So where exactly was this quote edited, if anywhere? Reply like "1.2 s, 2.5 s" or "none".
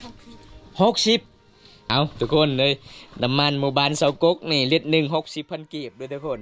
1.8 s

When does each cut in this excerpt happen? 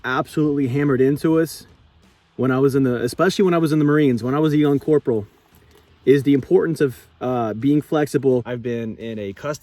8.5 s

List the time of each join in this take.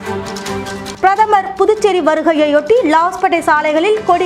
0.9 s

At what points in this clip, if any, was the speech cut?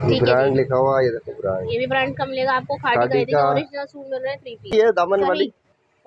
4.7 s

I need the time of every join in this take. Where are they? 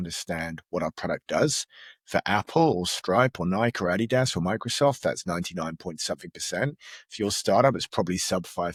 none

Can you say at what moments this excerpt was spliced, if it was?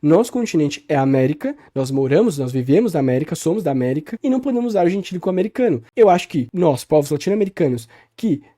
4.1 s, 5.9 s, 6.4 s

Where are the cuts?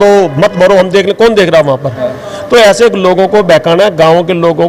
none

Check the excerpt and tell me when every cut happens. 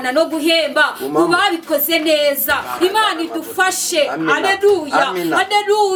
none

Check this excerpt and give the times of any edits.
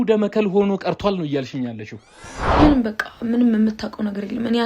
2.2 s

